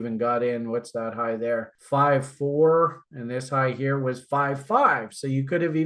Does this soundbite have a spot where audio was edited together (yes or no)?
yes